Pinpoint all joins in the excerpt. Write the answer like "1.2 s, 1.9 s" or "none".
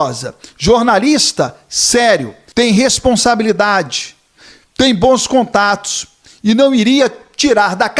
2.4 s